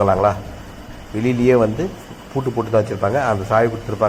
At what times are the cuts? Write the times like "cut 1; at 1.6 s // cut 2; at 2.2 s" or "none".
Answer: none

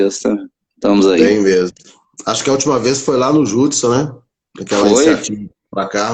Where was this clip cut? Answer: none

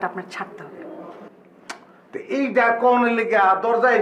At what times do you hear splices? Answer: none

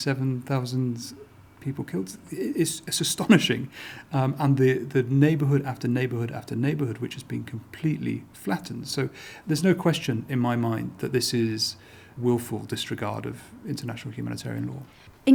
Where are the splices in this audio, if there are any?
none

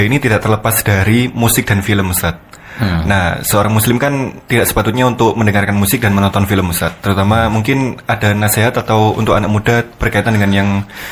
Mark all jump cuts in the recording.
none

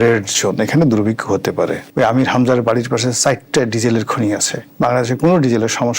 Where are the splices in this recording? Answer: cut 1; at 1.9 s // cut 2; at 4.6 s

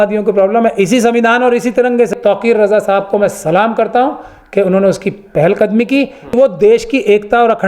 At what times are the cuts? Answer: cut 1; at 2.1 s // cut 2; at 6.3 s

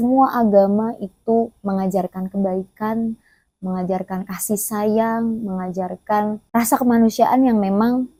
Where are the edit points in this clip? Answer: none

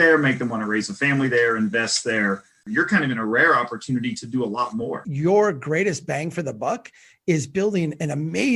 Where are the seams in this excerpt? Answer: cut 1; at 2.6 s // cut 2; at 5.1 s

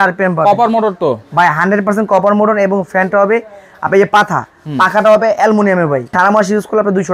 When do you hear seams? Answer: cut 1; at 6.1 s

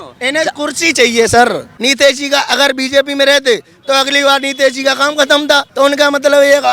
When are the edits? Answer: cut 1; at 1.7 s // cut 2; at 5.7 s

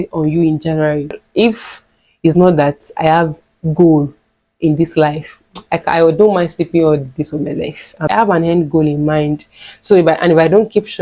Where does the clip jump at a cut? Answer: cut 1; at 1.0 s // cut 2; at 8.0 s

